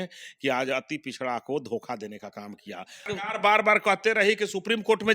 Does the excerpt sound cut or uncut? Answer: cut